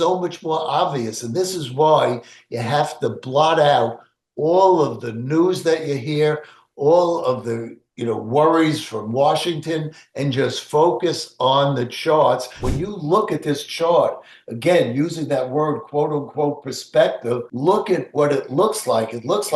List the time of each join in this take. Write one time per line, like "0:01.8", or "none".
0:12.7
0:17.5

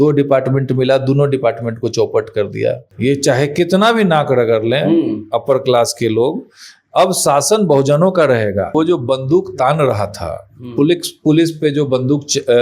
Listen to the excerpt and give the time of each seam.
0:02.9
0:08.7

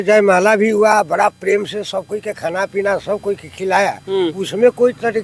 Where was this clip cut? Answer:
none

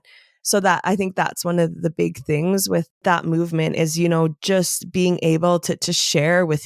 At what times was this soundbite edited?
0:03.0

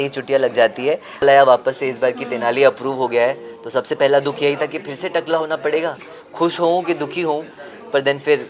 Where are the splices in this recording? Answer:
0:01.2

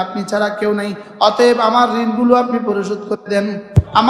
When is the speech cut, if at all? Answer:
none

